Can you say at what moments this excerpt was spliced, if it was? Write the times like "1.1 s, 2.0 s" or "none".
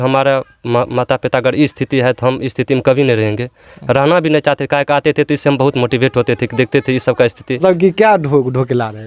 7.6 s